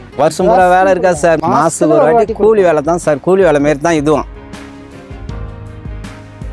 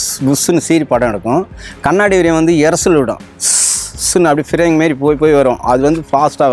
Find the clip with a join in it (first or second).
first